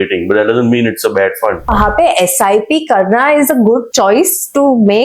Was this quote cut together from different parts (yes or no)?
yes